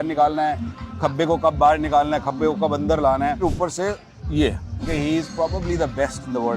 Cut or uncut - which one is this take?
cut